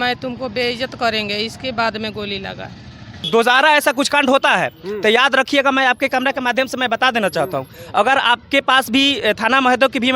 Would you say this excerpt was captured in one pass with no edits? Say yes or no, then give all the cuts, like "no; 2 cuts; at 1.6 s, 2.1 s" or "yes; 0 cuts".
no; 1 cut; at 3.2 s